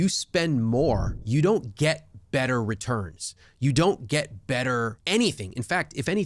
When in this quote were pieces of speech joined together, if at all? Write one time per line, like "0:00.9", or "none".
0:01.1
0:05.0